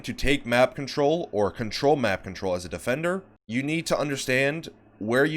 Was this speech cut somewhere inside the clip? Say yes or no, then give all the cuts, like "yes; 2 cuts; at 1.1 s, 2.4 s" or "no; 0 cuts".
yes; 1 cut; at 3.4 s